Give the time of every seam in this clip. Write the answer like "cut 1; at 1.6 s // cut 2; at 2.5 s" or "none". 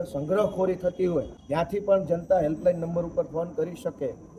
cut 1; at 1.4 s